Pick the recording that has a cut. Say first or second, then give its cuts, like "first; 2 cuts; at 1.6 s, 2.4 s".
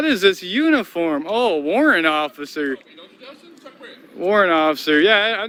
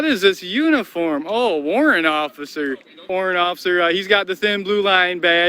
second; 1 cut; at 3.1 s